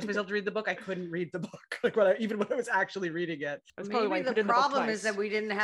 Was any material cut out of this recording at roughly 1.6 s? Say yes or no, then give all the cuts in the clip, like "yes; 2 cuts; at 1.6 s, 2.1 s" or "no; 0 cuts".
no; 1 cut; at 3.7 s